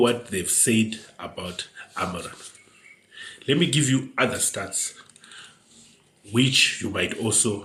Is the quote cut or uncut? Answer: uncut